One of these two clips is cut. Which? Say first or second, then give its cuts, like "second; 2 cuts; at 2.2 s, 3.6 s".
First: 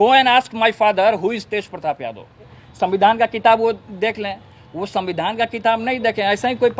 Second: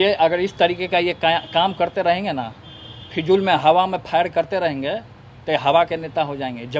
first; 1 cut; at 2.6 s